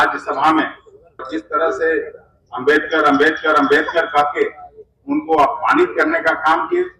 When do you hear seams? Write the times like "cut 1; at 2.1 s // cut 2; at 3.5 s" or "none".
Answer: cut 1; at 1.2 s